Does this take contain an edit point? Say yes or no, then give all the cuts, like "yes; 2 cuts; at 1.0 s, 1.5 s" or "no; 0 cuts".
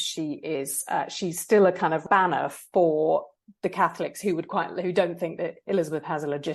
yes; 1 cut; at 2.0 s